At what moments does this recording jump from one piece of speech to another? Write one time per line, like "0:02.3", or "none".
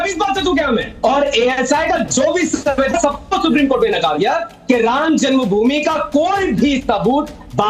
0:00.9